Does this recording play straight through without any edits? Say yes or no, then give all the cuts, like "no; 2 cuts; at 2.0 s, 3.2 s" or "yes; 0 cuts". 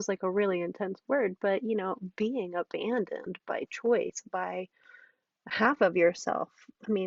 yes; 0 cuts